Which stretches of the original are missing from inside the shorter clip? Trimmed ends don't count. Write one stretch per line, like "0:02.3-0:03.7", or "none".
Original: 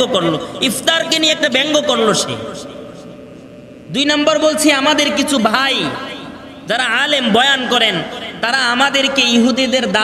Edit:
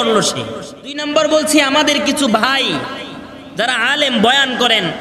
0:02.9-0:04.1